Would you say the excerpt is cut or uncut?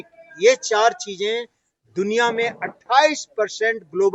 uncut